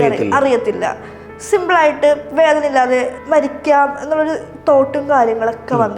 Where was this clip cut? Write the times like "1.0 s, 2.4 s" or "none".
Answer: 3.2 s